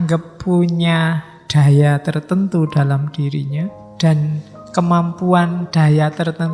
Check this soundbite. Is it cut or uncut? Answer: cut